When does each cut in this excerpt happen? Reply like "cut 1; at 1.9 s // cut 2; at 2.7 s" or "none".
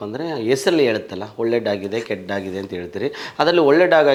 none